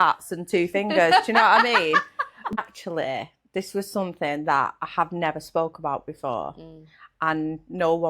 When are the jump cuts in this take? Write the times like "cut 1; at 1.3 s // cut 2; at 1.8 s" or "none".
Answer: cut 1; at 2.6 s